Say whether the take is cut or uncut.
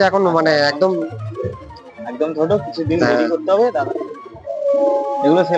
cut